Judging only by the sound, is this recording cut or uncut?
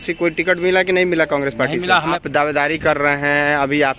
cut